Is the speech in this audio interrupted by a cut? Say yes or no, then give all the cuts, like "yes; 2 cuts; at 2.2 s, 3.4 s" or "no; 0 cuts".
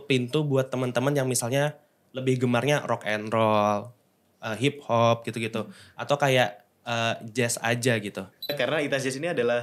yes; 1 cut; at 8.5 s